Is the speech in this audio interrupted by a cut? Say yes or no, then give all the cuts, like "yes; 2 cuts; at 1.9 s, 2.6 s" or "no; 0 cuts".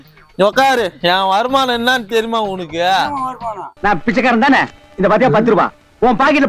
no; 0 cuts